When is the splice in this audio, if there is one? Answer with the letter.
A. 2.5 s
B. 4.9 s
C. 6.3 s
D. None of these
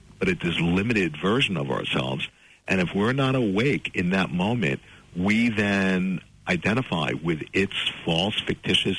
D